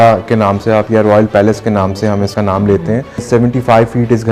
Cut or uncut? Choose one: cut